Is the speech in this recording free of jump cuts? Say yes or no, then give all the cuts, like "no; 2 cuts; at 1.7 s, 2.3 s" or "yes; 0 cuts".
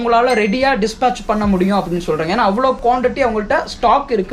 no; 1 cut; at 2.8 s